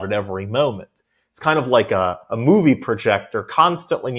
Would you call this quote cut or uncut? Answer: uncut